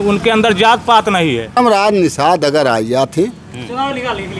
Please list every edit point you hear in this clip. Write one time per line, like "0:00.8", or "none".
0:01.6